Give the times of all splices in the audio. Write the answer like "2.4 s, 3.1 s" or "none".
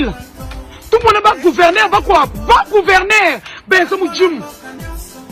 none